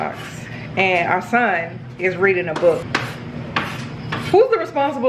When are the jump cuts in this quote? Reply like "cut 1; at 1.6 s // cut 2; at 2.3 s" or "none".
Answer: cut 1; at 2.9 s

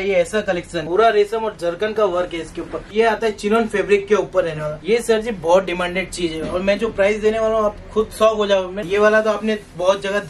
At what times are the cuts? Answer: cut 1; at 0.8 s // cut 2; at 2.9 s // cut 3; at 4.7 s // cut 4; at 8.8 s

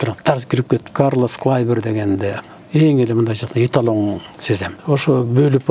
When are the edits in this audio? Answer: cut 1; at 0.9 s // cut 2; at 4.7 s

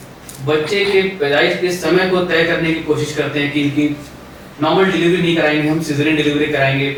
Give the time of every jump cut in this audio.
none

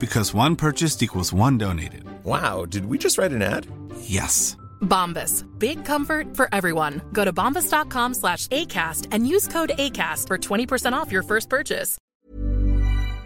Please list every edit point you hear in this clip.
cut 1; at 12.0 s

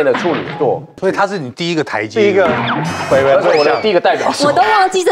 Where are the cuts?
cut 1; at 0.9 s

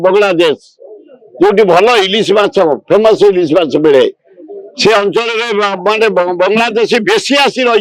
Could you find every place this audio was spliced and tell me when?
none

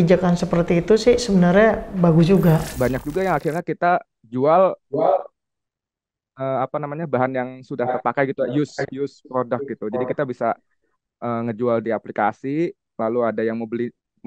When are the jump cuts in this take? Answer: cut 1; at 2.7 s

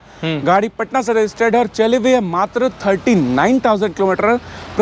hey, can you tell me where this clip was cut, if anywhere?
none

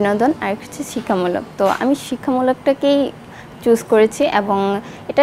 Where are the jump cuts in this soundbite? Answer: none

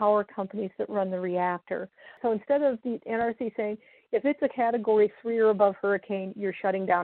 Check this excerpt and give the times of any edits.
cut 1; at 2.1 s

